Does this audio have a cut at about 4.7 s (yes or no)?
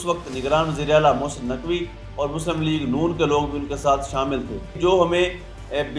yes